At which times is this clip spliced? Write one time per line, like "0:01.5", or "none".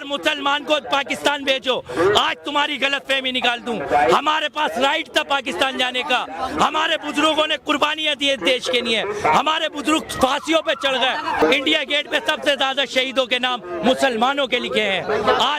0:11.4